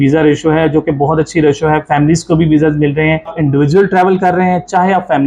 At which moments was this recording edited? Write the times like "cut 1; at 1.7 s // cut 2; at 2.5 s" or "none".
cut 1; at 3.4 s